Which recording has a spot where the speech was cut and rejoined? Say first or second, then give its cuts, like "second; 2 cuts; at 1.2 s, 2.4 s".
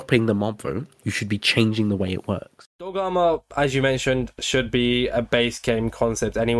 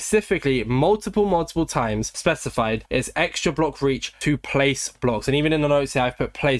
first; 1 cut; at 2.5 s